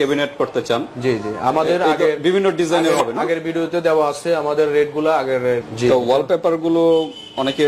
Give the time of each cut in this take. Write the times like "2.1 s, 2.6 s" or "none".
5.6 s